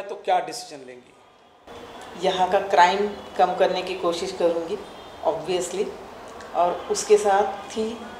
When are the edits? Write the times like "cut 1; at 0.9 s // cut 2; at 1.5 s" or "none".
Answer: cut 1; at 1.7 s